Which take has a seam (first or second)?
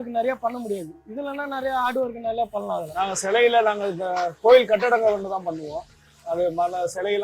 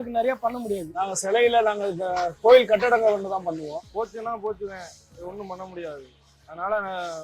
second